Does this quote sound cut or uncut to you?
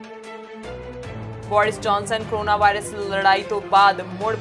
uncut